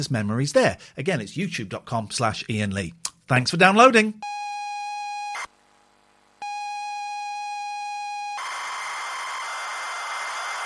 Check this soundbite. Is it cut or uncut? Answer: cut